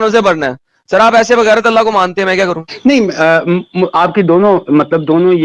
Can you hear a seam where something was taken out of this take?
no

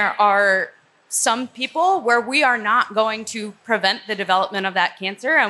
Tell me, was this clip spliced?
no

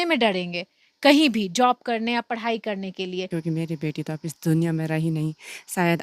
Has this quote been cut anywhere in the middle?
yes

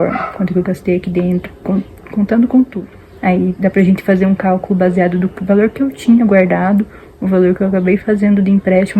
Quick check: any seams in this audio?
yes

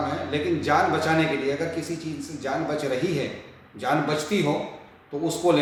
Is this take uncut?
yes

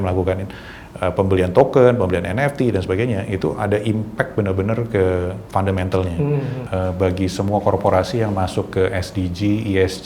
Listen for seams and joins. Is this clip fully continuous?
no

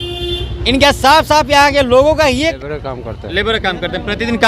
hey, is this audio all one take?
no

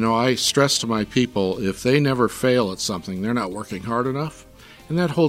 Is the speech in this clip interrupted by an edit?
no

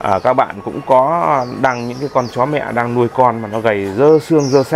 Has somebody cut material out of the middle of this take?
no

